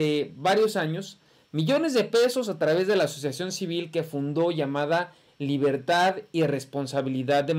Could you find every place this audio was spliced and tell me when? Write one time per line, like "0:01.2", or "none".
none